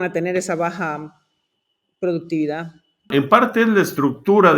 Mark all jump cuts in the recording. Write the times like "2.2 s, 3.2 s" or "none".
3.1 s